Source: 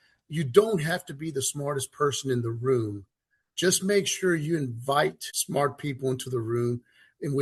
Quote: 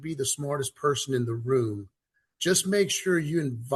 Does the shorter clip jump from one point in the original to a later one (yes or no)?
no